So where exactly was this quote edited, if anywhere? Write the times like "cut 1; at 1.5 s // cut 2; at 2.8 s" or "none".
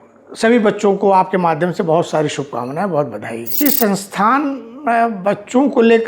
cut 1; at 3.5 s